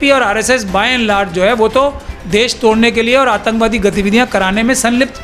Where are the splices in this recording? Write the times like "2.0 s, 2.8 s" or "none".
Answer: none